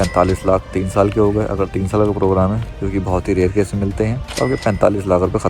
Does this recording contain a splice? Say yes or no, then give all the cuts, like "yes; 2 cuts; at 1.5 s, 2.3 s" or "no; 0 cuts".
no; 0 cuts